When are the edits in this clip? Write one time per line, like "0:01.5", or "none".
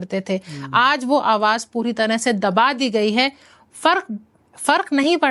none